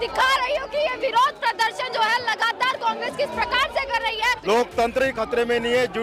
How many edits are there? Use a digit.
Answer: 1